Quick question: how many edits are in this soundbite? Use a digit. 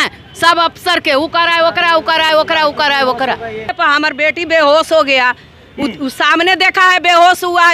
1